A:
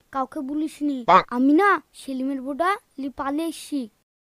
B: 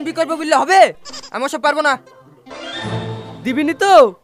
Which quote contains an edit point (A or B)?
B